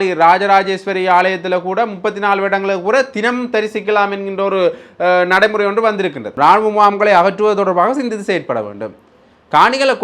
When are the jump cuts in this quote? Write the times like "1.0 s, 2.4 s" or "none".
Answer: 6.3 s

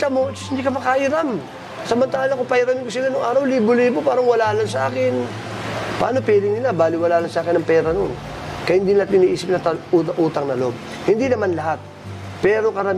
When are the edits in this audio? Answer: none

